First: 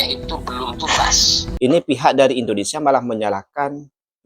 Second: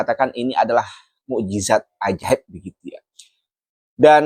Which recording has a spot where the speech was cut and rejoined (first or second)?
first